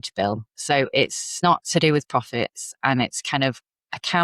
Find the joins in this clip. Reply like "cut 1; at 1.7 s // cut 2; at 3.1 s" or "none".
cut 1; at 1.4 s